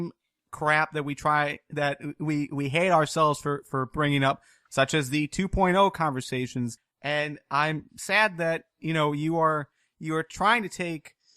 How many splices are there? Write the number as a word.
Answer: one